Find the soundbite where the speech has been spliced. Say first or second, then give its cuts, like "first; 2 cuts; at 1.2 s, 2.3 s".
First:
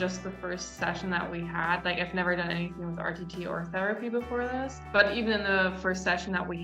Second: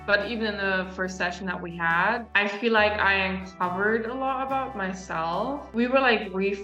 second; 1 cut; at 5.6 s